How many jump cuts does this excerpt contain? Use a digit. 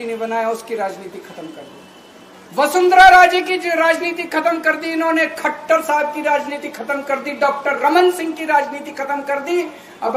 0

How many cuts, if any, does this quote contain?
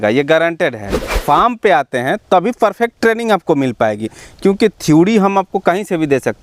1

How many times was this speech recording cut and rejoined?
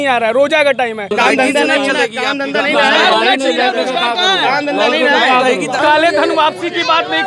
2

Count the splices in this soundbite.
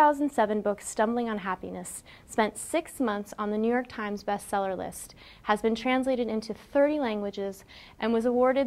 0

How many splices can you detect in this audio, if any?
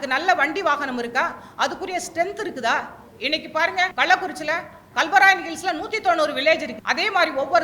2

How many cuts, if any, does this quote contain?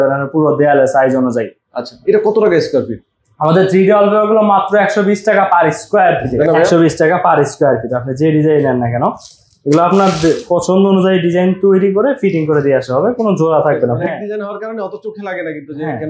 2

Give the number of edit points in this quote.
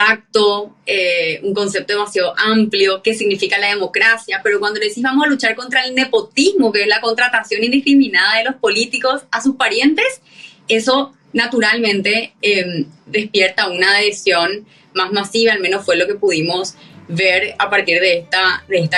0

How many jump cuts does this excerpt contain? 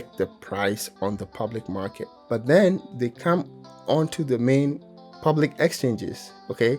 3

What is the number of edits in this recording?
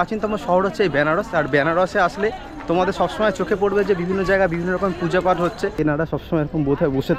1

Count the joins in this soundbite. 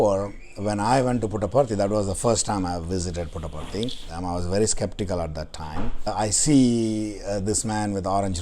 2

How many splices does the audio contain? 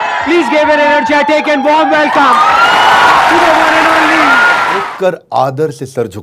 1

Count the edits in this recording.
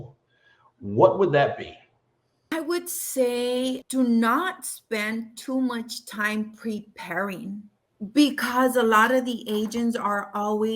3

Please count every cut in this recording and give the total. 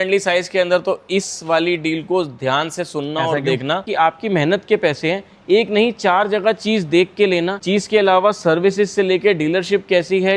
1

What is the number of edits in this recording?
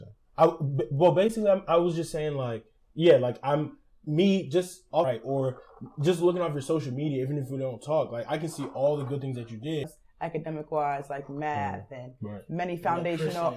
2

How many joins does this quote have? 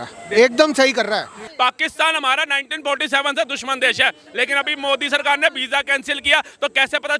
1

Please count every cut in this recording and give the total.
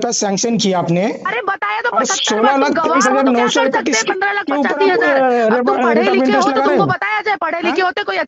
0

